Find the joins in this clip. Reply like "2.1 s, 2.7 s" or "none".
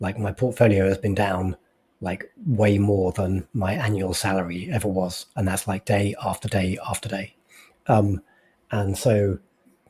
none